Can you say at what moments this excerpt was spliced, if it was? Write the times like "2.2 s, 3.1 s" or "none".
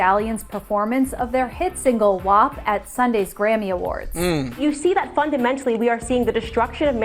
2.6 s